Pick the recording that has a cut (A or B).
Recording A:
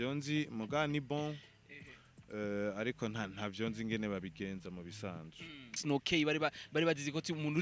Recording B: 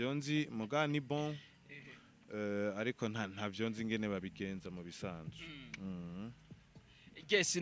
A